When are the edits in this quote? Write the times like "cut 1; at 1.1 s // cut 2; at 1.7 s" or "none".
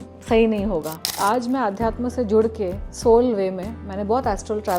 cut 1; at 1.2 s // cut 2; at 2.9 s